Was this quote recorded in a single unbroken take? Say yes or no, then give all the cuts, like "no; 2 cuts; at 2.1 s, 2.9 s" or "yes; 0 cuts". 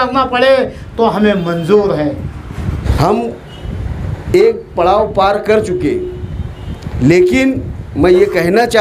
no; 1 cut; at 2.8 s